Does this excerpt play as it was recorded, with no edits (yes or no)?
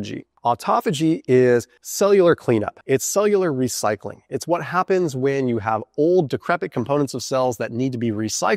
no